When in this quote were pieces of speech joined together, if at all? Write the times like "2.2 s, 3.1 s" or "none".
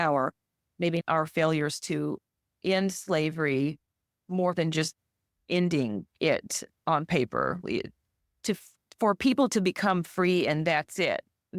1.0 s